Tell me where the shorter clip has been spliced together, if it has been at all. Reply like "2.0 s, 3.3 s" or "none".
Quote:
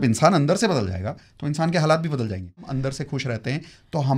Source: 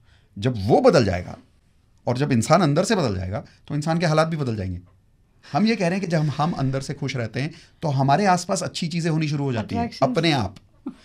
2.7 s